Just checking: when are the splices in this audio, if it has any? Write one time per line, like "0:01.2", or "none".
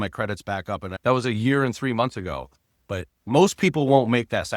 0:00.9